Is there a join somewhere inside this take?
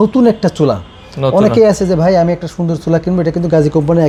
no; 0 cuts

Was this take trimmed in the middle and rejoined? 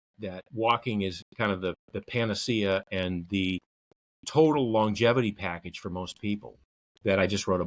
no; 0 cuts

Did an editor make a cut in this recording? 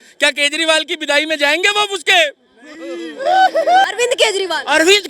yes; 1 cut; at 3.8 s

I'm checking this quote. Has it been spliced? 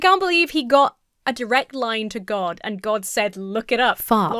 no; 0 cuts

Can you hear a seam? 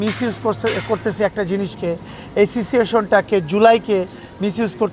no; 0 cuts

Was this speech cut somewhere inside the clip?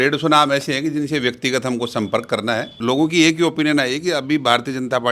yes; 1 cut; at 2.8 s

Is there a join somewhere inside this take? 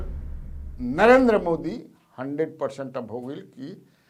no; 0 cuts

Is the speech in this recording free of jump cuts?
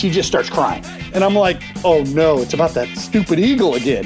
no; 2 cuts; at 1.1 s, 2.6 s

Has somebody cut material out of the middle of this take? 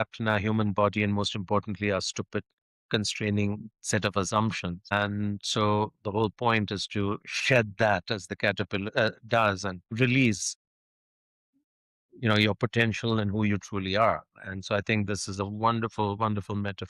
yes; 2 cuts; at 4.9 s, 9.9 s

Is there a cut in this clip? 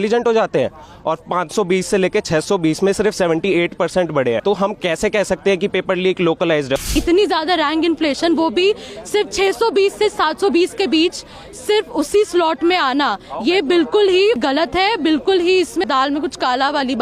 yes; 4 cuts; at 4.4 s, 6.9 s, 14.4 s, 15.9 s

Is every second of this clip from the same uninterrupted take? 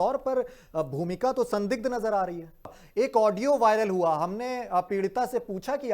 no; 1 cut; at 2.8 s

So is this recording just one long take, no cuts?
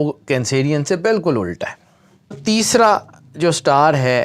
no; 1 cut; at 2.4 s

